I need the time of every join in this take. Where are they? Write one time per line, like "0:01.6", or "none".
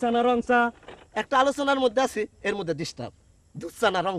none